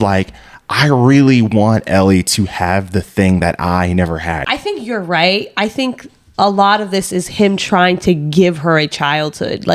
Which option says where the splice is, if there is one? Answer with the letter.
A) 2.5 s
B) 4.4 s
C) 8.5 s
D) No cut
B